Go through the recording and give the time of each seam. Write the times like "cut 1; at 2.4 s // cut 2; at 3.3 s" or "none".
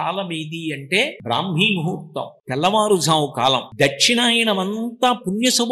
cut 1; at 1.2 s // cut 2; at 2.3 s // cut 3; at 3.7 s